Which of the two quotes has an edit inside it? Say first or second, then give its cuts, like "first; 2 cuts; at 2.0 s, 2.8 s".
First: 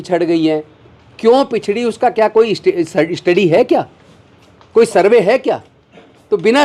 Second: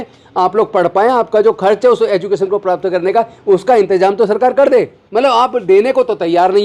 second; 1 cut; at 5.0 s